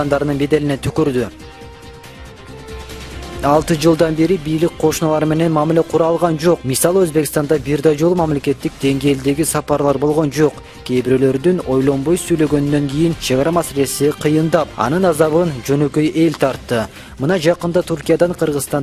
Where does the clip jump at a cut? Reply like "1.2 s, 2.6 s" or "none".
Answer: none